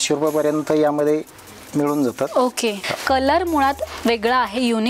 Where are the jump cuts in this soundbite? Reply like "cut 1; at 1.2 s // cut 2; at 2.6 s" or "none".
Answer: cut 1; at 2.9 s

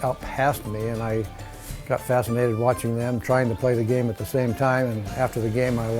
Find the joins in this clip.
none

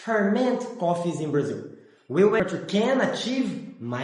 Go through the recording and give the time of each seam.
cut 1; at 2.4 s

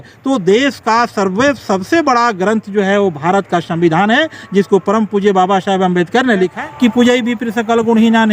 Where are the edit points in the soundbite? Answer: cut 1; at 6.6 s

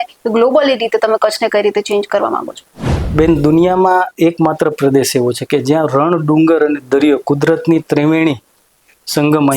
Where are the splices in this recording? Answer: none

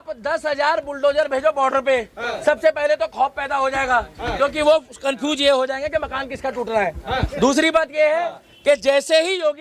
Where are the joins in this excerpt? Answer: none

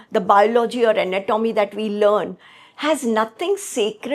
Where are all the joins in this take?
none

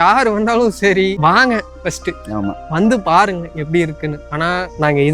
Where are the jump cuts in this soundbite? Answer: cut 1; at 1.2 s

